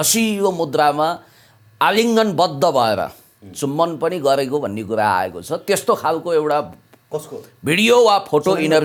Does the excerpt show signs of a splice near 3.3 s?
no; 0 cuts

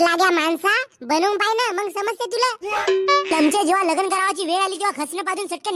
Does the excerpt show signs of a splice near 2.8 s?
yes; 1 cut; at 2.8 s

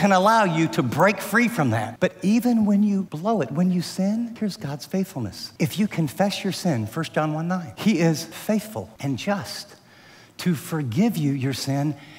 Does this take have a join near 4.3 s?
yes; 6 cuts; at 1.9 s, 3.1 s, 4.3 s, 5.4 s, 7.7 s, 8.3 s

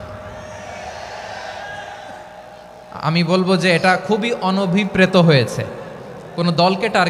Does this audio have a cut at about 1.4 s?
no; 0 cuts

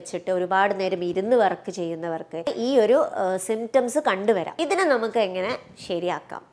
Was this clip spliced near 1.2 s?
no; 2 cuts; at 2.5 s, 4.5 s

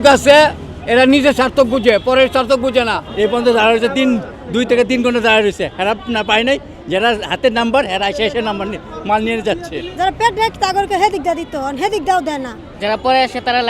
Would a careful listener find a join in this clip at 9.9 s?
yes; 3 cuts; at 3.0 s, 9.9 s, 12.6 s

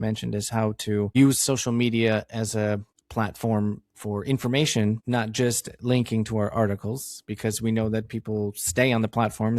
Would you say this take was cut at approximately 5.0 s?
yes; 3 cuts; at 1.1 s, 3.0 s, 5.0 s

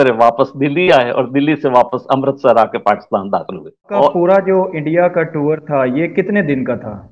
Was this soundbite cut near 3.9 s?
yes; 1 cut; at 3.9 s

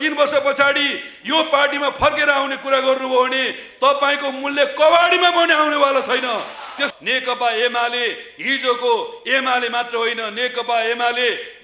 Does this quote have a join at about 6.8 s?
yes; 1 cut; at 6.8 s

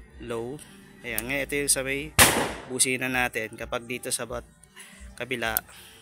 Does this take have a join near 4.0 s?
no; 0 cuts

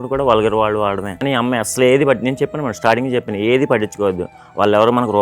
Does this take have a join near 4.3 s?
no; 1 cut; at 1.1 s

